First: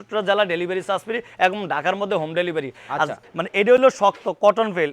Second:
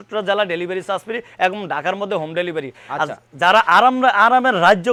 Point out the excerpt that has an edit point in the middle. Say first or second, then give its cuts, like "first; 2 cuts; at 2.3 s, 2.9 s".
first; 1 cut; at 3.2 s